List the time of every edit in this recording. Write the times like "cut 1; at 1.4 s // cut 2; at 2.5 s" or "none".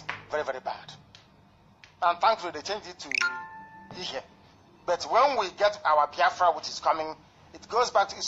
cut 1; at 5.2 s